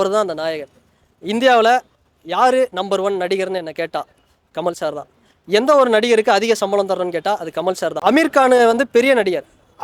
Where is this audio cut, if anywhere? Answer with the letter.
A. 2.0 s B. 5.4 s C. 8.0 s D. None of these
C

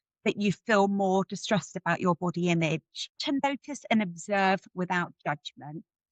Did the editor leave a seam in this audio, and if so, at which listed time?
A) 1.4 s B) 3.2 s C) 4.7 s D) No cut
B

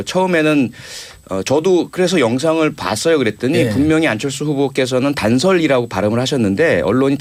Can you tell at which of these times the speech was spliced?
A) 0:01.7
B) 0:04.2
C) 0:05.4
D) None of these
D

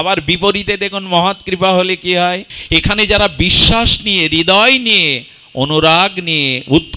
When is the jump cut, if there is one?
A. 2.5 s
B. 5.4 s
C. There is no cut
A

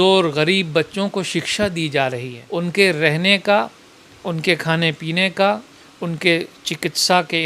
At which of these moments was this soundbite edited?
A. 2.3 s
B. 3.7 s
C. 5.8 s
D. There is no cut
A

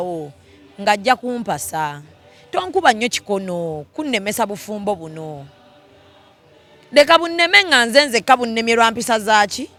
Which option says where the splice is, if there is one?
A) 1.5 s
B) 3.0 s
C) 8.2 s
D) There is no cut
D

